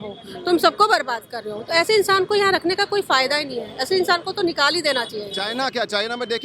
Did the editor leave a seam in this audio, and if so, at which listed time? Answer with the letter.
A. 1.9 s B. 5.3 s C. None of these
B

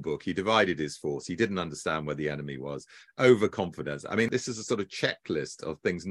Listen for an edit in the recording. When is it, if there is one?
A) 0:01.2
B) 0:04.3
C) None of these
B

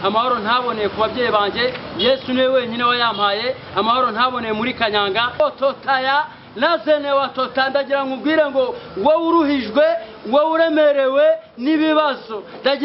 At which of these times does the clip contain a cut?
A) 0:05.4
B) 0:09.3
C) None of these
A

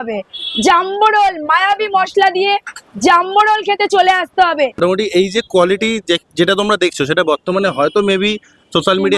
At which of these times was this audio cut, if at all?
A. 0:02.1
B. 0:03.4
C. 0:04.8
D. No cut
C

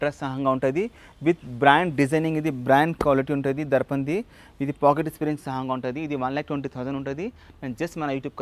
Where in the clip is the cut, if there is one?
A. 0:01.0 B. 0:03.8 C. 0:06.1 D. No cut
D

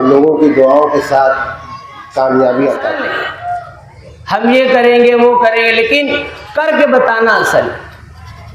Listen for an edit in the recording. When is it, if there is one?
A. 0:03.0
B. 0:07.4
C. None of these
A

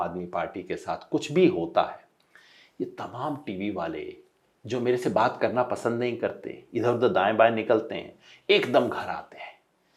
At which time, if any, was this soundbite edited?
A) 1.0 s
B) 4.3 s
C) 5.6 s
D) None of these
D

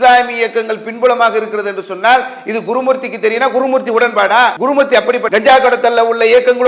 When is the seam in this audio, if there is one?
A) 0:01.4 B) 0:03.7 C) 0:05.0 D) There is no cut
C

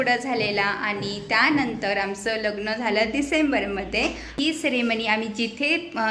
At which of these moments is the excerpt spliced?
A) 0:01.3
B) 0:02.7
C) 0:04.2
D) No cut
C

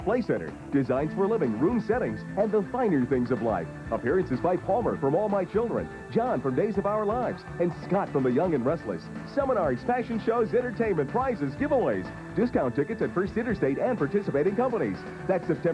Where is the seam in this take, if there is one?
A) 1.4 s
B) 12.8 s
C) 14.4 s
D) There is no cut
C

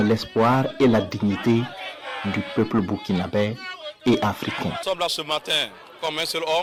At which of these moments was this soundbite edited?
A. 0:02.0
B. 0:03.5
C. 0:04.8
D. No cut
D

